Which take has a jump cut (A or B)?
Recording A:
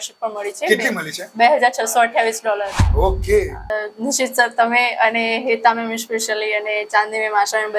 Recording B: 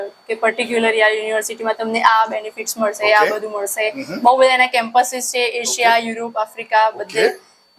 A